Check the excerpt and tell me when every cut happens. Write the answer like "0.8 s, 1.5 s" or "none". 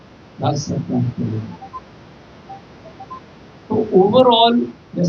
none